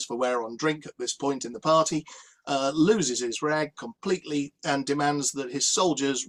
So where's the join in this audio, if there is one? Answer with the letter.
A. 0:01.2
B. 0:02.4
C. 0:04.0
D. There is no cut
D